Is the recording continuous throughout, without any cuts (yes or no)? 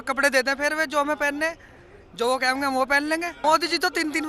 no